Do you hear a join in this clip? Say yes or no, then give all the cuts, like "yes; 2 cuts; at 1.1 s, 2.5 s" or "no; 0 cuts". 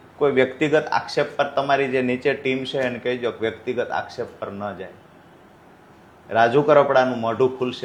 no; 0 cuts